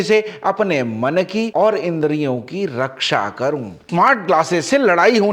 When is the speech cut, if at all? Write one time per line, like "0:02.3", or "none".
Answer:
0:03.9